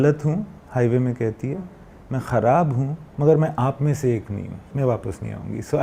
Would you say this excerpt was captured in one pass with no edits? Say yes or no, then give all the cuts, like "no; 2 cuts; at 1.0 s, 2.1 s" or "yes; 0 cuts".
no; 1 cut; at 4.6 s